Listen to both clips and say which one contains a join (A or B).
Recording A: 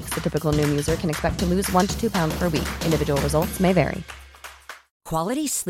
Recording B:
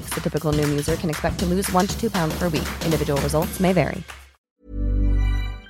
B